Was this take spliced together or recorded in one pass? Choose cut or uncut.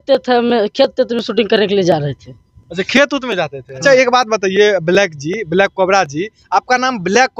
cut